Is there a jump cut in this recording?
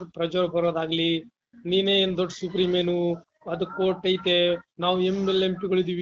no; 0 cuts

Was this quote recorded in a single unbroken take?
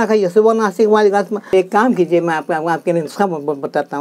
no; 1 cut; at 1.5 s

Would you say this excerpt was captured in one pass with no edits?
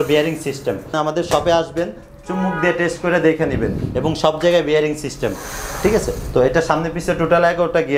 no; 1 cut; at 0.9 s

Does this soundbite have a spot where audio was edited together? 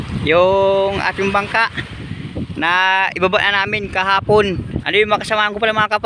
yes; 1 cut; at 4.8 s

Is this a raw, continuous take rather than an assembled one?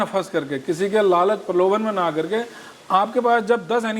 yes; 0 cuts

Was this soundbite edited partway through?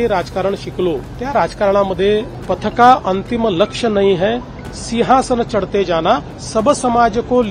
yes; 3 cuts; at 1.1 s, 2.3 s, 6.4 s

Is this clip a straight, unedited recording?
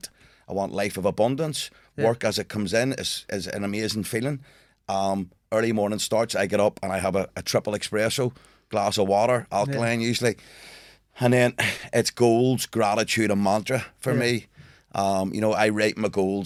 yes; 0 cuts

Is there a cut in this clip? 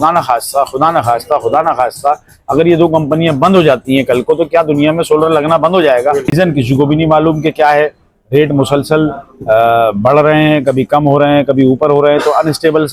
yes; 1 cut; at 6.3 s

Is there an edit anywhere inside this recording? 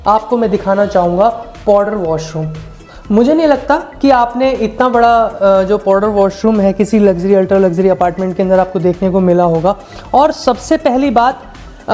no; 0 cuts

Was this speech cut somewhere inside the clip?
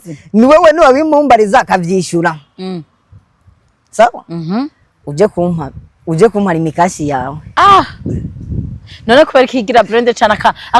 yes; 1 cut; at 7.4 s

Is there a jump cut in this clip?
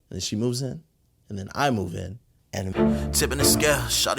yes; 1 cut; at 2.6 s

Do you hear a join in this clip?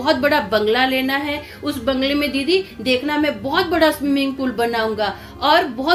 no; 0 cuts

